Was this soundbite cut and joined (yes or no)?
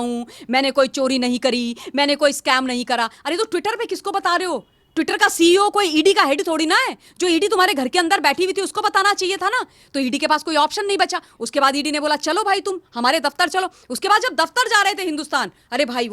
no